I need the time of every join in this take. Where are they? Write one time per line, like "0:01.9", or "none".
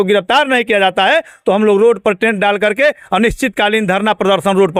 none